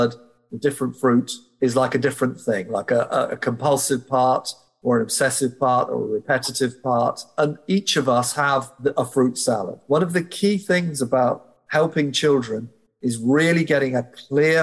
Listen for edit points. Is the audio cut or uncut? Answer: cut